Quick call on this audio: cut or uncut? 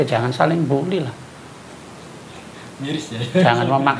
uncut